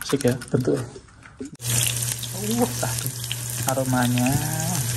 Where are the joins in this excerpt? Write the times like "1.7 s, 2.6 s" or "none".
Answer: 1.5 s